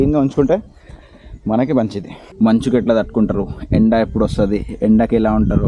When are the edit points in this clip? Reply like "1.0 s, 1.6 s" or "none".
2.2 s

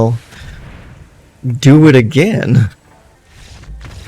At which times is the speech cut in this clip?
3.2 s

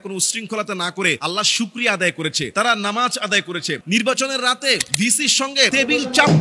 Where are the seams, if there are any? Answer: 3.8 s

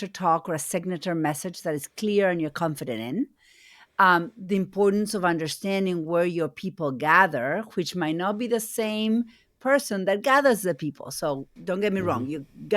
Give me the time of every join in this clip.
11.5 s

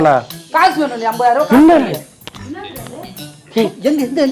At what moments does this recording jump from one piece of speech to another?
none

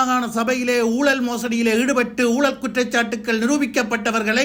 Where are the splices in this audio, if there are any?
none

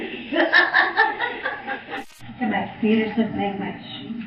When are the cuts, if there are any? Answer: 1.9 s

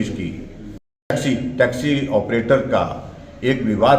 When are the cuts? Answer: 1.1 s

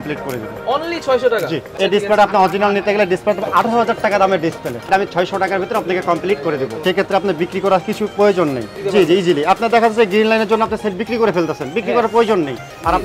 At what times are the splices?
1.7 s, 4.9 s, 6.8 s, 8.8 s

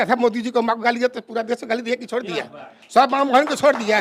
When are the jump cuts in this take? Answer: none

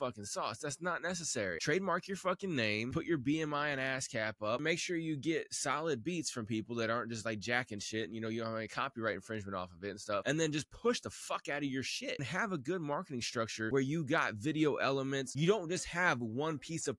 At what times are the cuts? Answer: 1.6 s, 2.9 s, 4.6 s, 10.2 s, 12.3 s, 13.7 s, 15.3 s

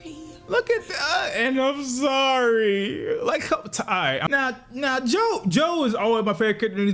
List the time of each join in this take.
4.3 s

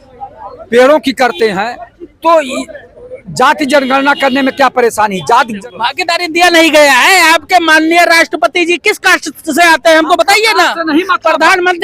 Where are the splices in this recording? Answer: 5.5 s

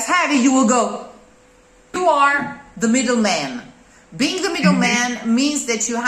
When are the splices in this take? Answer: 1.8 s

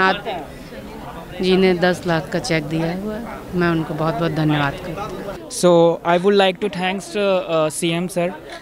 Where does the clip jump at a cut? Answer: 5.2 s

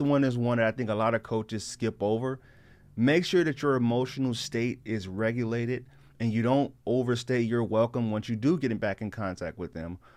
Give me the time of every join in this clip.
none

